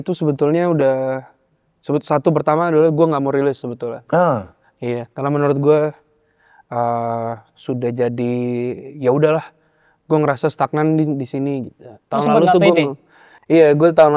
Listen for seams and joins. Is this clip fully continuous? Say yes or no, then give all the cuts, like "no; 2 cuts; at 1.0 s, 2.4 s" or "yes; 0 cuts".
yes; 0 cuts